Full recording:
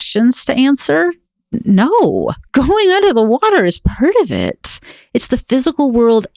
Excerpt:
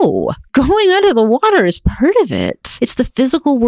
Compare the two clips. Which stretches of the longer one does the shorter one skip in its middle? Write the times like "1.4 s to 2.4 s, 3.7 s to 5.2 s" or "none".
4.6 s to 4.9 s